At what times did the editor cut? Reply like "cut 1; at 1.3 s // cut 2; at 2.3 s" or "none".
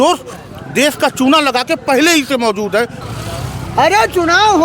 cut 1; at 3.0 s